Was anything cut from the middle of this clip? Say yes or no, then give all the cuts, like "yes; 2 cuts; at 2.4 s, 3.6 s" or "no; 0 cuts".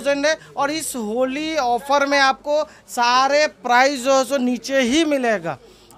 no; 0 cuts